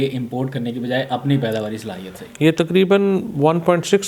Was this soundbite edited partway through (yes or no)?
no